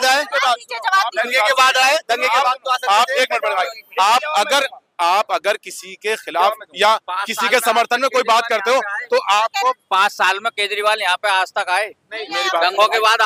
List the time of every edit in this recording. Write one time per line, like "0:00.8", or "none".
none